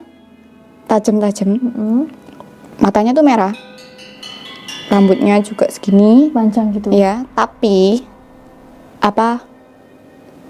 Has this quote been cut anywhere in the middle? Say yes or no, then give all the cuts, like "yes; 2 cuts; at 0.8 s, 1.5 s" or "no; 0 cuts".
no; 0 cuts